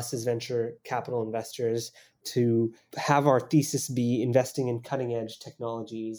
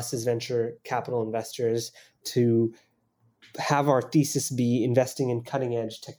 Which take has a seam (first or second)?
first